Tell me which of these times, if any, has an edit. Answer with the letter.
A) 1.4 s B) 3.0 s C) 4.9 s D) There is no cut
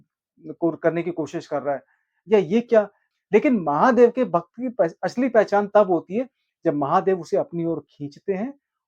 B